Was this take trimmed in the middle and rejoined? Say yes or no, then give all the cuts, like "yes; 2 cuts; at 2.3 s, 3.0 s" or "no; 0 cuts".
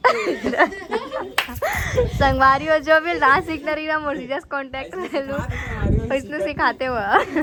no; 0 cuts